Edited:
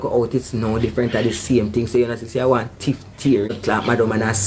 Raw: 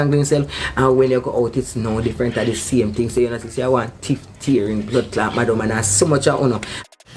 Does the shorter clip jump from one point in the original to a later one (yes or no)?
yes